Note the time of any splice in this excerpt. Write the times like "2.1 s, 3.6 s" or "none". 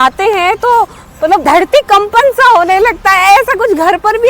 1.4 s